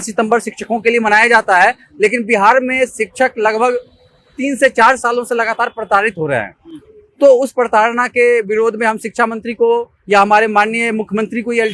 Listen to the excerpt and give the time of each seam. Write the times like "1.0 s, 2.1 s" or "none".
none